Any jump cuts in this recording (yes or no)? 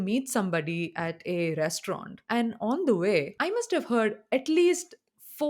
yes